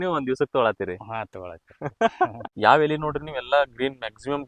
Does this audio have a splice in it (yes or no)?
yes